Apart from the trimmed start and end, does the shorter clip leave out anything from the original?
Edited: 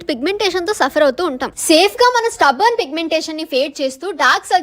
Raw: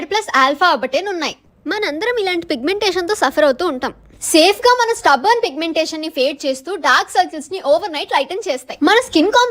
yes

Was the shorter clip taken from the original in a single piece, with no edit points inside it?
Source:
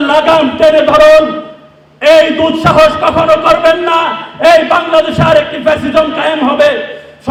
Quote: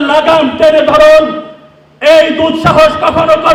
yes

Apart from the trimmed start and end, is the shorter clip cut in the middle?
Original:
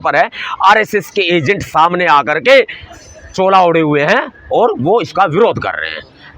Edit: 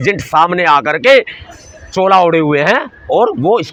no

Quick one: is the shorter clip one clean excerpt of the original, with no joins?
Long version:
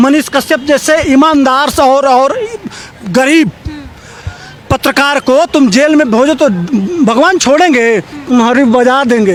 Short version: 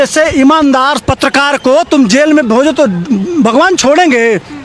no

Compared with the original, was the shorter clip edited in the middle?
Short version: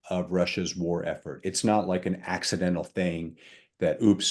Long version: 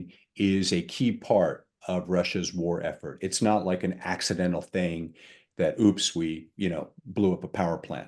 no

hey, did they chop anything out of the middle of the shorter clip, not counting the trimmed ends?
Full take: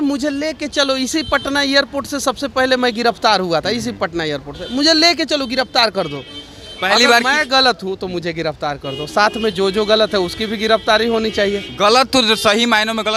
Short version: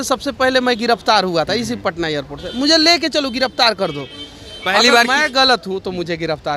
no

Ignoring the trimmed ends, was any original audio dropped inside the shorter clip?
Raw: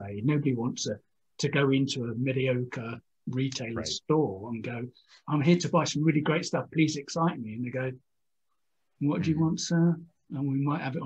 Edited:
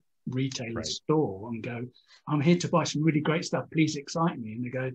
no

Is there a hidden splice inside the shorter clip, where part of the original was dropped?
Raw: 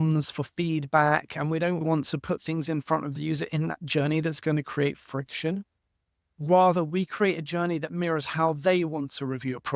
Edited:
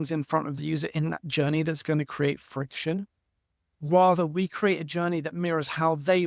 no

